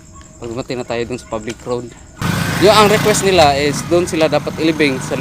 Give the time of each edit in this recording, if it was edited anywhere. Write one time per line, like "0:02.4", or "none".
0:02.2